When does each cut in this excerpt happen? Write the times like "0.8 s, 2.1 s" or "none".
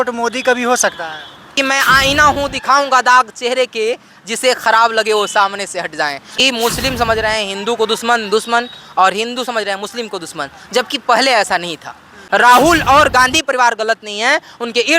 1.5 s, 6.2 s, 12.2 s